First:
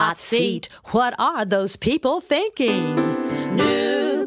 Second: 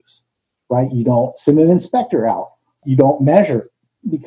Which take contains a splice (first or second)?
second